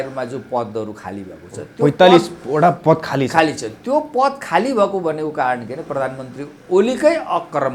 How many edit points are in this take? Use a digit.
0